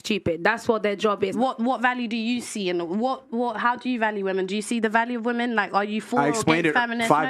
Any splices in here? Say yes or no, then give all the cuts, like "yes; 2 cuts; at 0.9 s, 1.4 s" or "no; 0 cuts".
yes; 1 cut; at 1.3 s